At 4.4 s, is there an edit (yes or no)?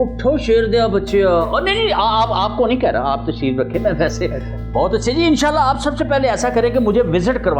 no